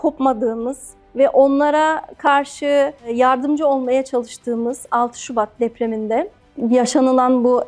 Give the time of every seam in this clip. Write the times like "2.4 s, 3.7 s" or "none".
none